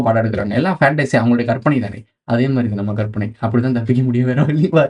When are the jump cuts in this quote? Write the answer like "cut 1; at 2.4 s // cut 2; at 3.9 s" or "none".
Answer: none